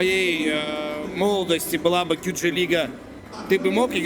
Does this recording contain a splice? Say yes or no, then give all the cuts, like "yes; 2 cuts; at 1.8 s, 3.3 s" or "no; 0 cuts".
no; 0 cuts